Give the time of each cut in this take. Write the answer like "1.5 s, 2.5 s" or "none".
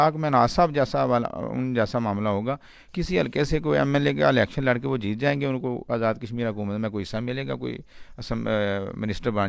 none